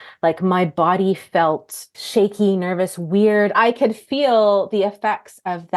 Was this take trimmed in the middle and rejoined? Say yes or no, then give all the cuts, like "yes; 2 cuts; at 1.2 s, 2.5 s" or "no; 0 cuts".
yes; 2 cuts; at 1.9 s, 3.5 s